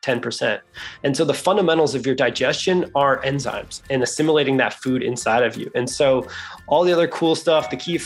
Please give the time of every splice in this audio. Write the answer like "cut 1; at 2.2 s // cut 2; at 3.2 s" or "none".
cut 1; at 3.8 s

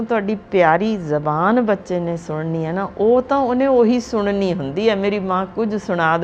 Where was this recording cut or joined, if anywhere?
none

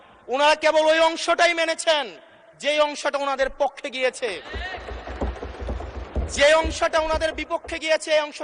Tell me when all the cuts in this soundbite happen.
none

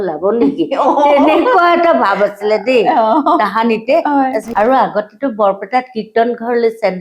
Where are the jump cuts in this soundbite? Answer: cut 1; at 4.5 s

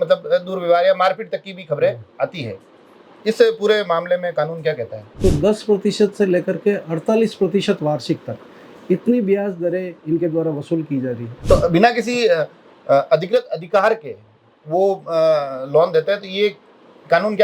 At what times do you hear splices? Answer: cut 1; at 5.2 s // cut 2; at 11.4 s

